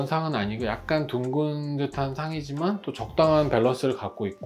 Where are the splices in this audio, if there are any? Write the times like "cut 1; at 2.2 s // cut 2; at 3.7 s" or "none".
none